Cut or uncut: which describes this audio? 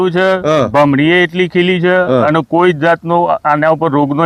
uncut